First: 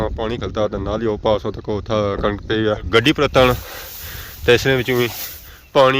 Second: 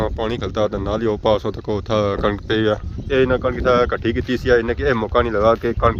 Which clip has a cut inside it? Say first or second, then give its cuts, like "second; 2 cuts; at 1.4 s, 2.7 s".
first; 1 cut; at 2.9 s